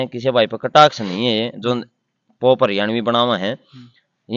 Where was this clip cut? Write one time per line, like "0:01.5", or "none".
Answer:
none